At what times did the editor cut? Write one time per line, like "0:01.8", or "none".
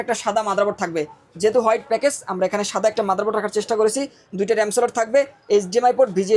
none